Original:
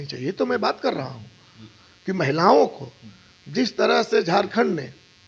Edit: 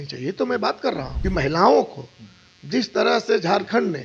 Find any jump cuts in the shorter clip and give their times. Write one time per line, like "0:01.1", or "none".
0:01.1

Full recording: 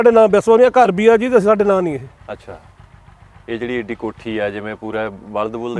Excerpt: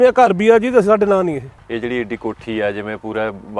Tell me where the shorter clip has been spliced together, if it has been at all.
0:01.5

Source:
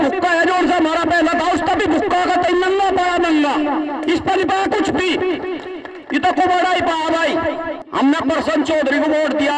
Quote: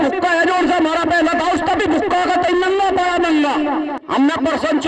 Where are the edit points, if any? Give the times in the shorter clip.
0:03.9

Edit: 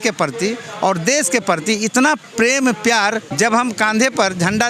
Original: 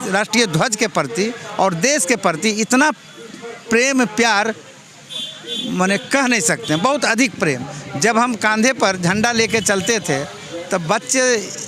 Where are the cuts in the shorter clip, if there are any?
0:02.3
0:03.3

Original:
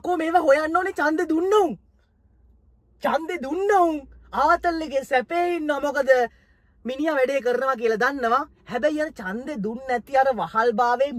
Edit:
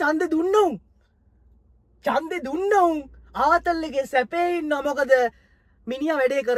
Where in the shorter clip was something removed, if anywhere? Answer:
none

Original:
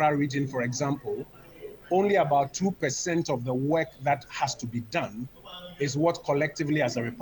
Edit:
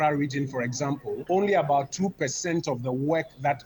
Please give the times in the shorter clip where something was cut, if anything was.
0:01.2

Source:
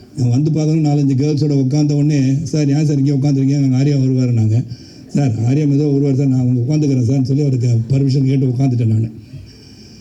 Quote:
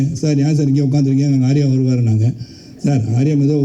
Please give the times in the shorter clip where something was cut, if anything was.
none

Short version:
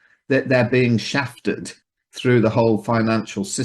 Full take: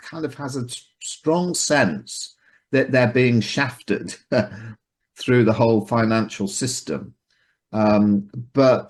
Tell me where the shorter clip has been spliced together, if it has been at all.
0:01.7

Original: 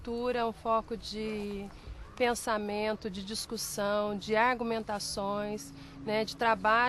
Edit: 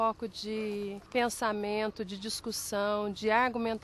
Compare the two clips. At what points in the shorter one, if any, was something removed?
0:01.0

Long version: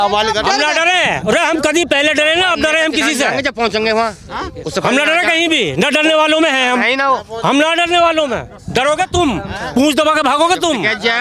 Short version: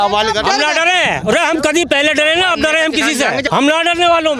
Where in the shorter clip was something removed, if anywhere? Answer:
0:03.5

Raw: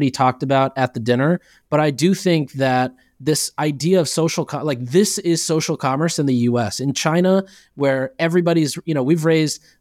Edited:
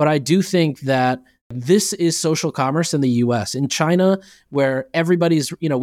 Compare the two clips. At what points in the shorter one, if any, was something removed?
0:01.5

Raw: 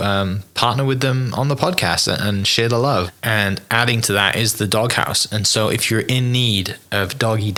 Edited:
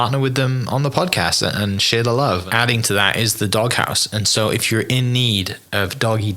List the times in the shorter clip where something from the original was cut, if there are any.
0:02.5

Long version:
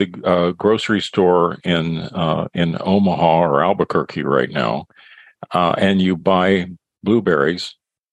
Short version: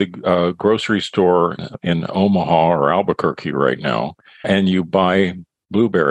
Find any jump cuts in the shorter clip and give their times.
0:01.7
0:04.4

